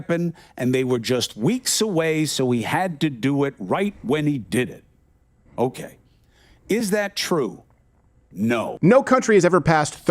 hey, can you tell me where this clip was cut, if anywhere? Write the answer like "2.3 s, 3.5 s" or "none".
8.7 s